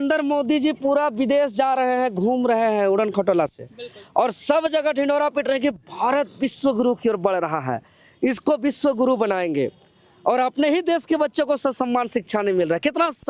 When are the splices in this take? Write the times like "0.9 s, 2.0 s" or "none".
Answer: none